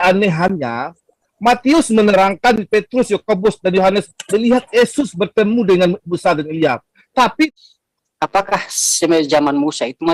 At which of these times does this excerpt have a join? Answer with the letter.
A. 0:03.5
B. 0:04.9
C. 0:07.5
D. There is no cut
C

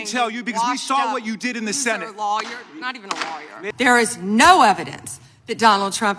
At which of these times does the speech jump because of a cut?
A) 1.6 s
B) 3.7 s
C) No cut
B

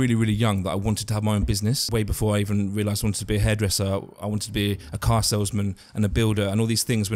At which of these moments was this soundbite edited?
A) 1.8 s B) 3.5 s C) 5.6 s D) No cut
A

